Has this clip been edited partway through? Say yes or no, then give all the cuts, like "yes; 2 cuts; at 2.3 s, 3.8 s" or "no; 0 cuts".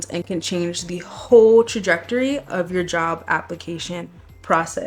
no; 0 cuts